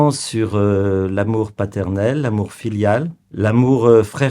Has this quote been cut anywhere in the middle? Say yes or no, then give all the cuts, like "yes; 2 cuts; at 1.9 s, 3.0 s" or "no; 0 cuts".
yes; 1 cut; at 3.2 s